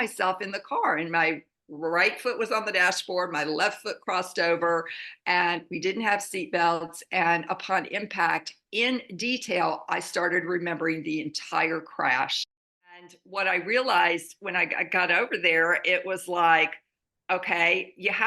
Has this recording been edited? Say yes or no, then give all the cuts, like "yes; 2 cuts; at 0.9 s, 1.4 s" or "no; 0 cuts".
yes; 1 cut; at 13.0 s